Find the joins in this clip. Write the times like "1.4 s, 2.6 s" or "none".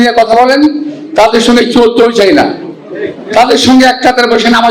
none